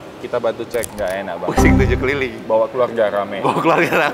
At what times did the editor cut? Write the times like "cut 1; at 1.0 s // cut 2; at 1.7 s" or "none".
cut 1; at 0.9 s